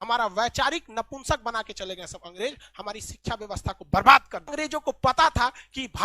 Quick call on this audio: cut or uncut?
cut